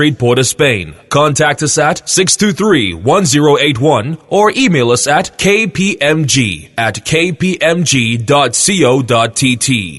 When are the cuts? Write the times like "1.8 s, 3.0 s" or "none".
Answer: 0.9 s